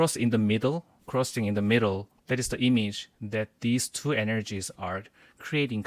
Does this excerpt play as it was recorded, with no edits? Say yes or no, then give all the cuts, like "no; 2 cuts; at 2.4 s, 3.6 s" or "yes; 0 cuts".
no; 2 cuts; at 0.9 s, 2.1 s